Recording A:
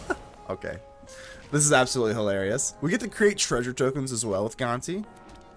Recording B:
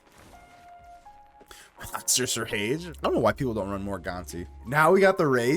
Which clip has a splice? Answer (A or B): B